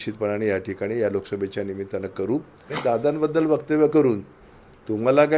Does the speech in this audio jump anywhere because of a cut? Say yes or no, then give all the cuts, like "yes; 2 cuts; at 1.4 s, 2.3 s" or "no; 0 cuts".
yes; 1 cut; at 2.7 s